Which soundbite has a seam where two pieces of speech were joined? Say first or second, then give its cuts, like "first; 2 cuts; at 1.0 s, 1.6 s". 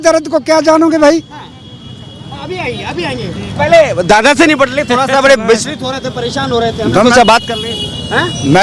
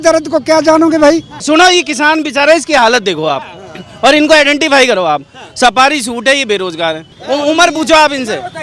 second; 2 cuts; at 1.3 s, 7.1 s